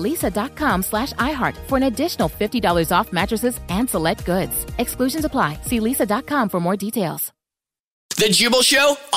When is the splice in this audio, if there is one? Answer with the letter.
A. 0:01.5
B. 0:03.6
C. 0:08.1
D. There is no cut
C